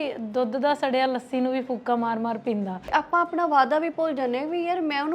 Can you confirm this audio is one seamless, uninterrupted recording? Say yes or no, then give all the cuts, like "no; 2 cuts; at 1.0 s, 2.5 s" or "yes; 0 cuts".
no; 1 cut; at 2.8 s